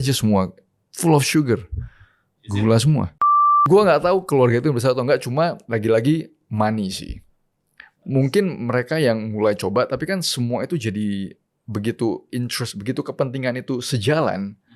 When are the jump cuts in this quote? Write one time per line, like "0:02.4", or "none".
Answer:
0:03.4